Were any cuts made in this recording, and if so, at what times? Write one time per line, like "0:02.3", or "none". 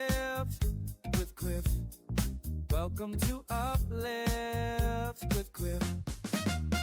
0:05.8